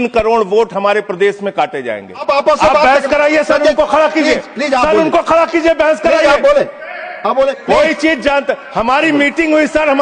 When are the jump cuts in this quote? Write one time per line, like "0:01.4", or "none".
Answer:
0:02.2